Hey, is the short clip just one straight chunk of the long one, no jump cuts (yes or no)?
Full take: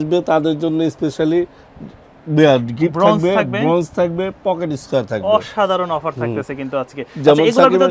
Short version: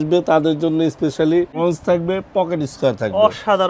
no